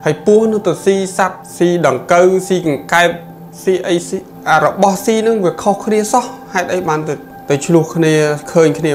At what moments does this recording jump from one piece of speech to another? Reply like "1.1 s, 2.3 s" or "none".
1.4 s, 4.3 s, 7.3 s